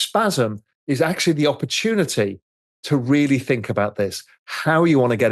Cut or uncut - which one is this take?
uncut